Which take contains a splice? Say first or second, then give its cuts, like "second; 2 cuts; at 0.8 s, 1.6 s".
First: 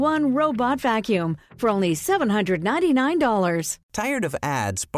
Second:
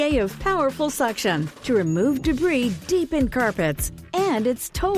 first; 1 cut; at 3.8 s